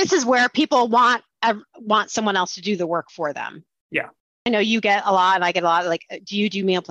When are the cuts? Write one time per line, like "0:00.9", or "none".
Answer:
0:04.5